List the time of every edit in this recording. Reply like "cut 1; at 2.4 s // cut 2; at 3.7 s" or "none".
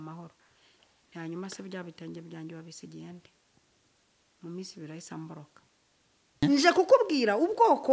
cut 1; at 6.4 s